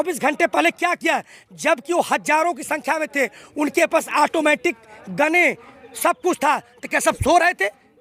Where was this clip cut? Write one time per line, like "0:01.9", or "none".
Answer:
none